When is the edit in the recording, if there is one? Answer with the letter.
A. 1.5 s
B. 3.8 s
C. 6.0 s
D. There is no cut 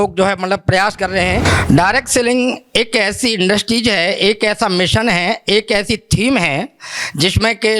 A